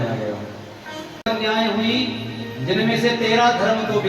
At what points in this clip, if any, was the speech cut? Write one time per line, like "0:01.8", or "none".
0:01.1